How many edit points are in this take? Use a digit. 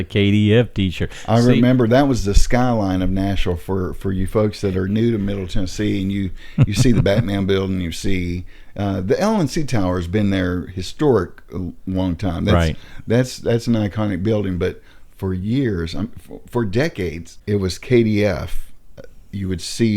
1